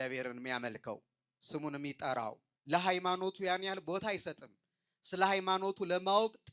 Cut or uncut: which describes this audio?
cut